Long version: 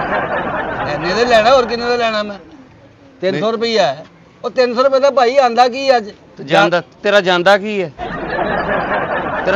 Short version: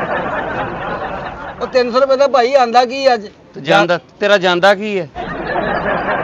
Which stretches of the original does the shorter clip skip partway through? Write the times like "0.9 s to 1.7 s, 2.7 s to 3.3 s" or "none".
1.3 s to 3.9 s